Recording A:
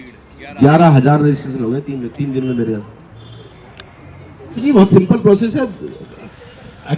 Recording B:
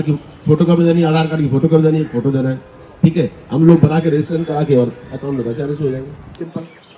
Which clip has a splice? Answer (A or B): A